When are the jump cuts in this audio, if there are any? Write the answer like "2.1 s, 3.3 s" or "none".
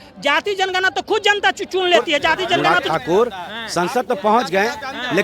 2.6 s